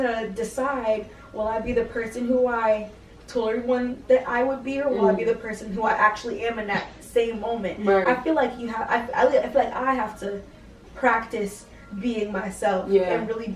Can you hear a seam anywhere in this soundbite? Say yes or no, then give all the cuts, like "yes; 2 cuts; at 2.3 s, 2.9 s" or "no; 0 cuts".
no; 0 cuts